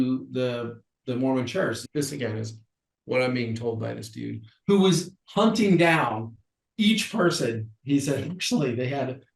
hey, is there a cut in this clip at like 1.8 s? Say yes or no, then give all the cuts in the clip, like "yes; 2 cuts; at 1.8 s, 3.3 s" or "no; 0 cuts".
yes; 1 cut; at 1.8 s